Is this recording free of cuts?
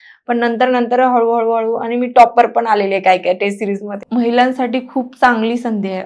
no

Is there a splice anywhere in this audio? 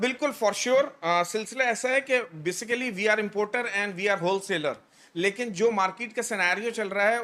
no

